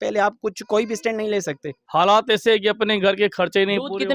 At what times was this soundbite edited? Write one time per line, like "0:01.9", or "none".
0:01.7